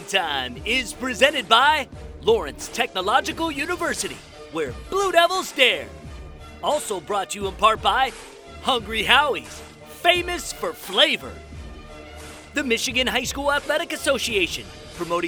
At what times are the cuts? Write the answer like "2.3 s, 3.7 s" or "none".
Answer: none